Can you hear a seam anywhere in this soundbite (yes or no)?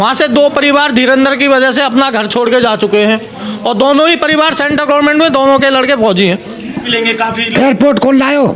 yes